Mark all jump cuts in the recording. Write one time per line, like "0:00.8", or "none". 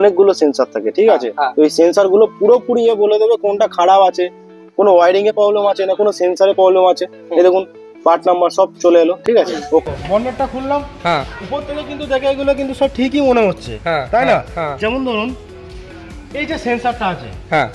0:09.8